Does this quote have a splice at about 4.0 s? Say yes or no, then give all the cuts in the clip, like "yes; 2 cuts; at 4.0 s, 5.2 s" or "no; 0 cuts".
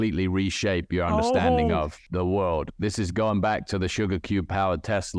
no; 1 cut; at 2.0 s